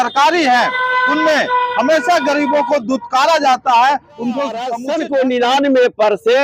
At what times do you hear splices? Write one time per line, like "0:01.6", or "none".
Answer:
0:04.8